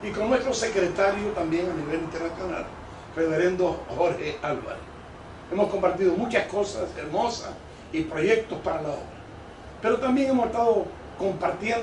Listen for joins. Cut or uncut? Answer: cut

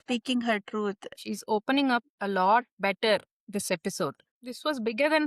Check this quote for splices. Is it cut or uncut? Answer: cut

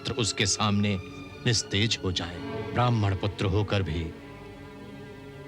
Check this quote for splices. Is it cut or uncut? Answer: cut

